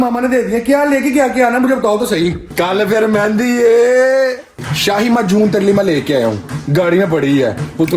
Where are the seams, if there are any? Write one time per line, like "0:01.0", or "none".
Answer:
0:02.5
0:04.7
0:06.5